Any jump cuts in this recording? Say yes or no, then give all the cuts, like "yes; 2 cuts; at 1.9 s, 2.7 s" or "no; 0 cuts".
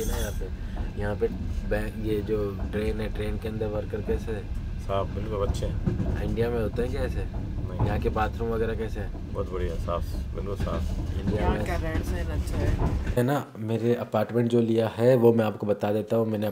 yes; 1 cut; at 13.2 s